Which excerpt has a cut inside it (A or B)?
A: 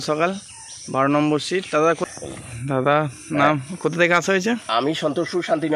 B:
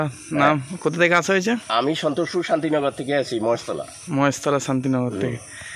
A